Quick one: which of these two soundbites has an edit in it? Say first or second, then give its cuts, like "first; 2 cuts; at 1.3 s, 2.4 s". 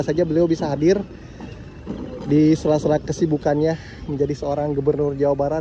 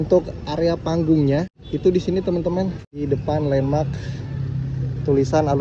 second; 2 cuts; at 1.6 s, 3.0 s